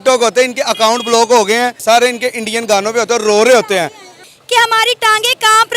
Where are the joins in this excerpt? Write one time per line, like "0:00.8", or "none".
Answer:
0:01.8
0:04.3

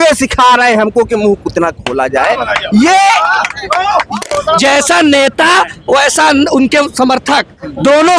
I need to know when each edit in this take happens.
0:04.2

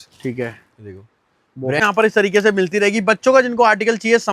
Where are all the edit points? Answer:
0:01.8

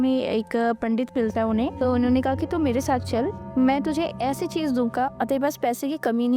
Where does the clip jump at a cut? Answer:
0:01.8
0:03.4
0:05.1

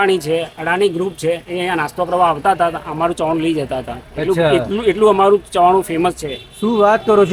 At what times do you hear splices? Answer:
none

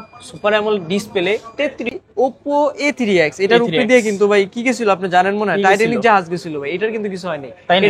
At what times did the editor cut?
0:01.9

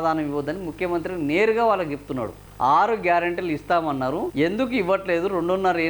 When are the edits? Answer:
0:02.4
0:04.3

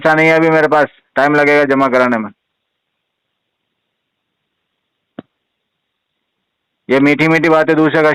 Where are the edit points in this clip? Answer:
none

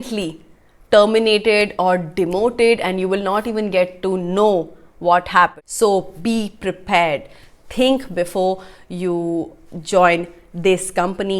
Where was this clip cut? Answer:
0:05.6

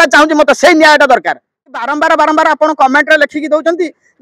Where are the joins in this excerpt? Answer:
0:01.7

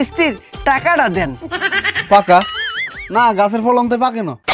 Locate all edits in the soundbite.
none

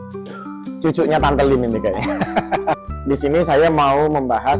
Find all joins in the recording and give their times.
0:02.9

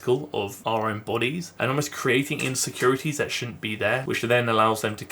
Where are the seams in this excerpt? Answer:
0:04.0

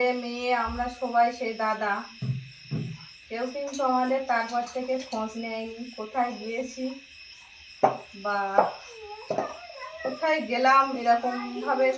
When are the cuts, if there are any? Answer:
none

